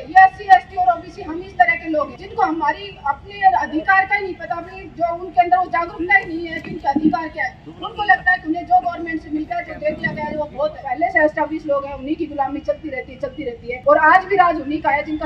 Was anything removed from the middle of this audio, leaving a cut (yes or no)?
yes